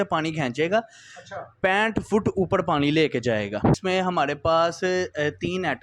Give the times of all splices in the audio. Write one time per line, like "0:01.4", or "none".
0:03.8